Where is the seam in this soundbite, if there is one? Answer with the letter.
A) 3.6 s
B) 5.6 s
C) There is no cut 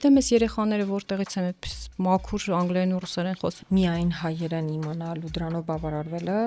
A